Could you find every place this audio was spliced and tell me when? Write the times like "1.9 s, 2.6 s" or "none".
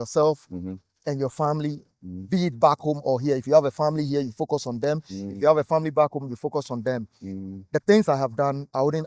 none